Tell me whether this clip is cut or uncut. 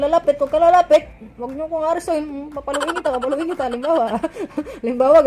uncut